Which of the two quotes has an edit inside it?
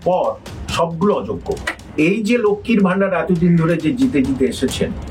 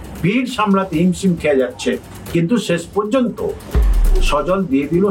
first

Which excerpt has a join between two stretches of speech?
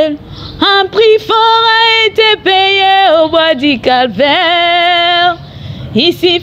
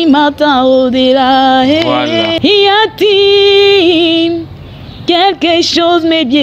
second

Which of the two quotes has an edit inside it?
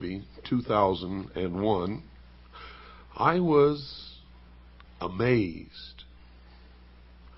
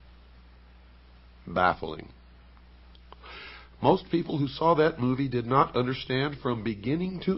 first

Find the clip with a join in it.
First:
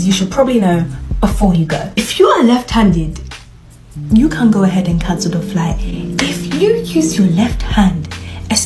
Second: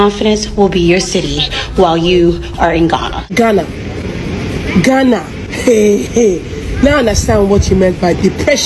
second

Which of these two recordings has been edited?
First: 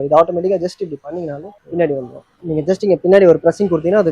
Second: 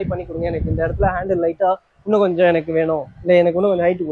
first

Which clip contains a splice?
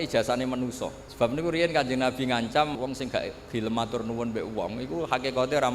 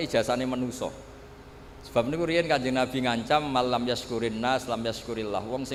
first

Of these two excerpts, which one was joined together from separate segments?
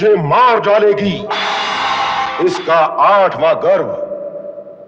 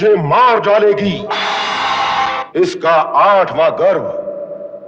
first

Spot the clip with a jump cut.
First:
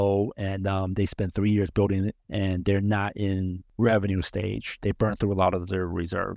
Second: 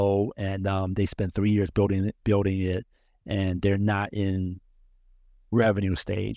first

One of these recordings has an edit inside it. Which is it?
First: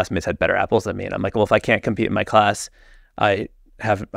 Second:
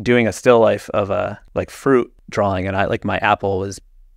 second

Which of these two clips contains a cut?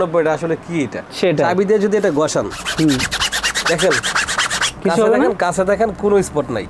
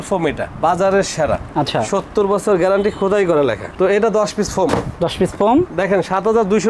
second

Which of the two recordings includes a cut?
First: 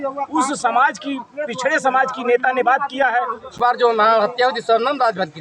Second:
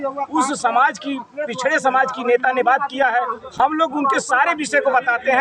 first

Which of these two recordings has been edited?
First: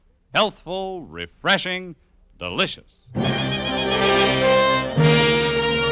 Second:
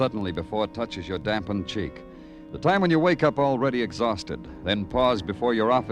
second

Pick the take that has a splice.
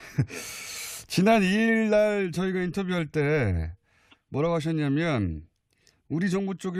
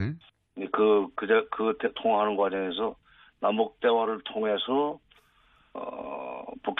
second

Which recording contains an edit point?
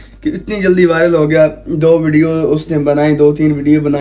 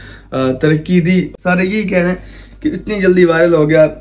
second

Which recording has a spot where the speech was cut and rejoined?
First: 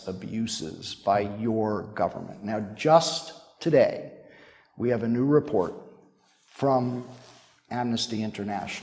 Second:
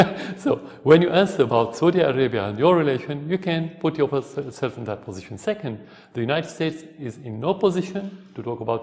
second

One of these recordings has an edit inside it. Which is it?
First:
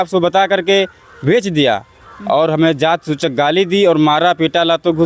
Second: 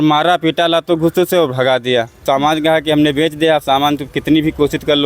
second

